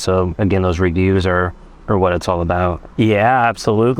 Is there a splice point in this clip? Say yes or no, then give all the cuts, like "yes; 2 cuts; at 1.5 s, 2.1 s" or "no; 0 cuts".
no; 0 cuts